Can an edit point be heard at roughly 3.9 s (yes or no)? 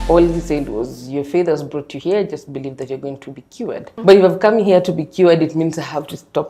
yes